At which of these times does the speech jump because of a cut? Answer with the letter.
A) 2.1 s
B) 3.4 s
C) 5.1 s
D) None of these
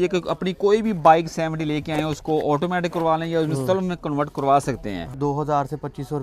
C